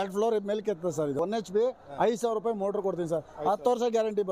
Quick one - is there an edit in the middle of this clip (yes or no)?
yes